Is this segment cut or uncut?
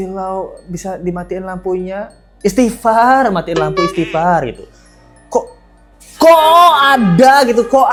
uncut